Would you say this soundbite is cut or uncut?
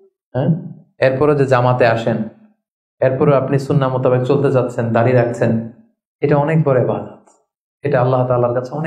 uncut